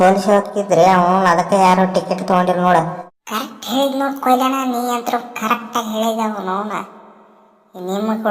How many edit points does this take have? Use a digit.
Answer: 1